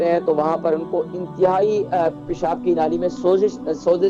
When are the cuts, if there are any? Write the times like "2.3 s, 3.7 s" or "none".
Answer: none